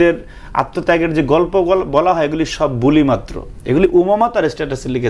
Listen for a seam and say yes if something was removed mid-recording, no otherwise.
no